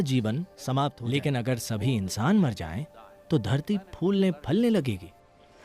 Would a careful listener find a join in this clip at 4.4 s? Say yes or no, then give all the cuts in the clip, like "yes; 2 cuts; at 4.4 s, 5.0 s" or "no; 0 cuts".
no; 1 cut; at 1.0 s